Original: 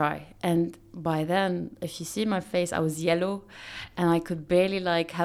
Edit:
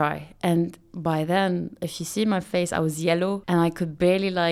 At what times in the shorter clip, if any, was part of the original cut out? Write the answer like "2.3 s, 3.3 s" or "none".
3.4 s